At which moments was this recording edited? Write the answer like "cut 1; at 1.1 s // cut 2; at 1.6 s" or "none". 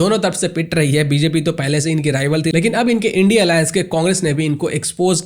cut 1; at 2.5 s